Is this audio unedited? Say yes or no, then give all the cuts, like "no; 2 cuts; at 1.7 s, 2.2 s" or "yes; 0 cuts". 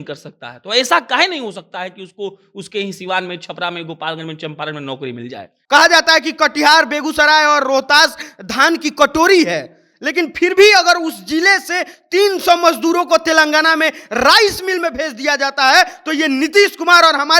no; 1 cut; at 5.5 s